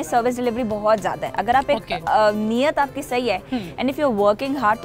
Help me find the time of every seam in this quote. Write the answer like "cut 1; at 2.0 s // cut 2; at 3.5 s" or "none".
none

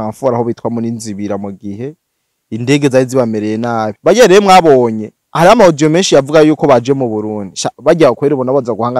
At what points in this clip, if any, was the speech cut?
cut 1; at 3.8 s

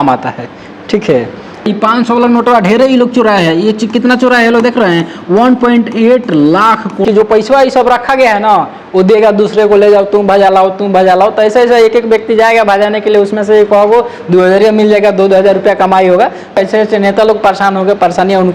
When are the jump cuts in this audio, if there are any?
cut 1; at 1.7 s // cut 2; at 7.0 s // cut 3; at 16.6 s

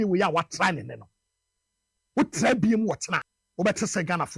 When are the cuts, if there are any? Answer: cut 1; at 3.4 s

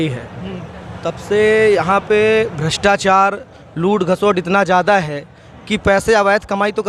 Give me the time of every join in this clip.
none

